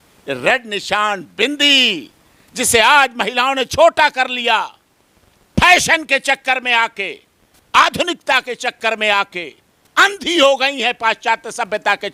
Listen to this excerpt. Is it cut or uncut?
uncut